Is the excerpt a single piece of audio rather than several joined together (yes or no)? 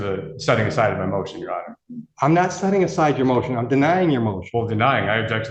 yes